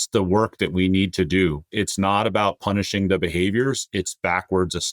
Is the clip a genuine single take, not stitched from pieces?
no; 1 cut; at 1.6 s

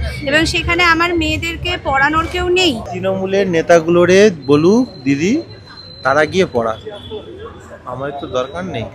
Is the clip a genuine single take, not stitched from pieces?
no; 1 cut; at 2.9 s

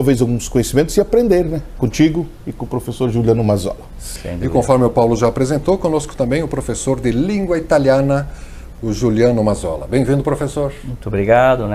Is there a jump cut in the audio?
yes; 1 cut; at 4.1 s

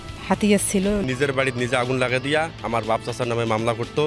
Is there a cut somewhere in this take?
yes; 1 cut; at 1.0 s

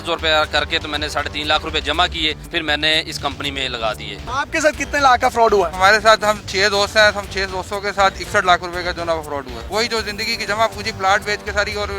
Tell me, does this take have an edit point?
yes; 3 cuts; at 2.5 s, 4.2 s, 9.6 s

